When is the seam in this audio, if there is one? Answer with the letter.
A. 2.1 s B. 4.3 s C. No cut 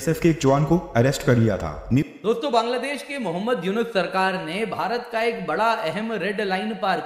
A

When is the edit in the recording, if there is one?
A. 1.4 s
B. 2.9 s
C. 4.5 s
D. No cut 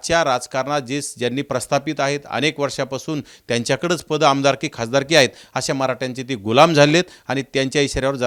D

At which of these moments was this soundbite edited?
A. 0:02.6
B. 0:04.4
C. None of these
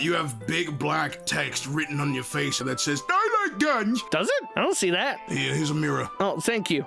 A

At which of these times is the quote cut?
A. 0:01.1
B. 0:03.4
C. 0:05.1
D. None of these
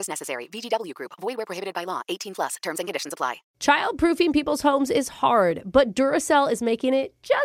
B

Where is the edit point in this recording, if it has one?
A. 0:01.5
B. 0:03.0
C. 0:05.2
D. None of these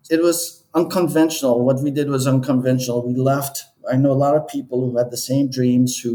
D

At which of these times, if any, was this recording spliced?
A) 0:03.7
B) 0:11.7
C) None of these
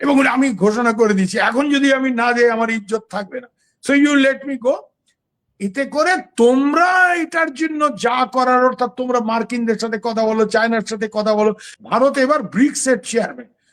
B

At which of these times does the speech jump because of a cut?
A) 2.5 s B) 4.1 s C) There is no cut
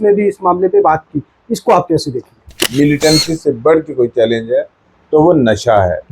A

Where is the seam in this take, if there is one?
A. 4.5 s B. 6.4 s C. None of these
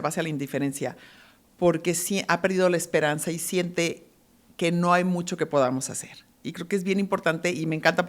C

